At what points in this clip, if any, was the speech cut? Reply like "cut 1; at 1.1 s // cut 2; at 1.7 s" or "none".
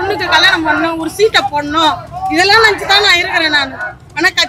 none